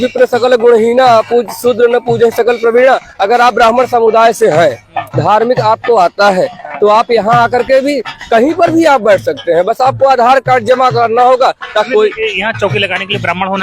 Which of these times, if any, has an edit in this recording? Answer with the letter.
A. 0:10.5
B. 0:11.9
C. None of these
B